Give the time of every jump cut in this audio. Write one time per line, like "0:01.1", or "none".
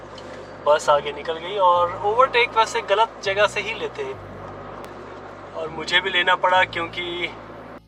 none